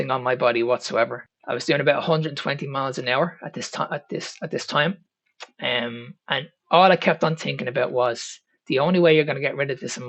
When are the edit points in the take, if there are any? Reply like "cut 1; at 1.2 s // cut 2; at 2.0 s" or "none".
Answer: cut 1; at 1.3 s